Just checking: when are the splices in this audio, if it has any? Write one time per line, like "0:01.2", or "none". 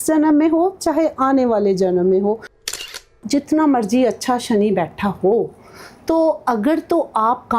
0:02.8